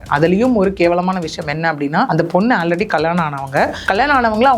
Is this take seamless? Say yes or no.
no